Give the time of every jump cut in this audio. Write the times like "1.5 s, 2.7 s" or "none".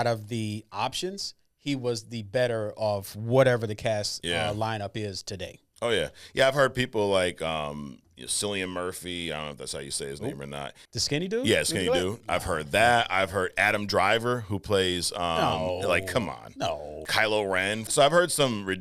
10.8 s, 17.0 s, 17.9 s